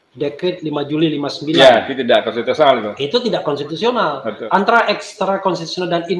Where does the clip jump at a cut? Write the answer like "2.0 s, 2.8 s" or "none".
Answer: 4.3 s